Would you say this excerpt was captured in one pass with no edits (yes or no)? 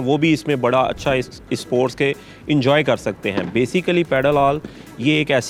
yes